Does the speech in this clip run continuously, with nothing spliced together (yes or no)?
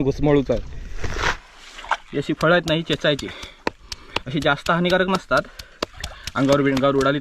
no